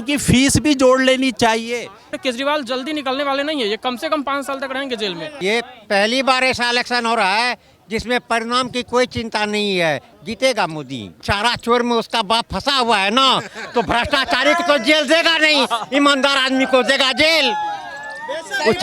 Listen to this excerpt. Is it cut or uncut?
cut